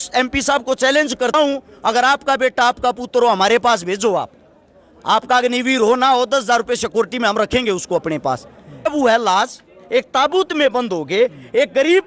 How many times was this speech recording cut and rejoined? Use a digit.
2